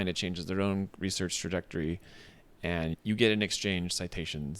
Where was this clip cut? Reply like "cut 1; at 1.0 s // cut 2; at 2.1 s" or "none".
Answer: cut 1; at 3.0 s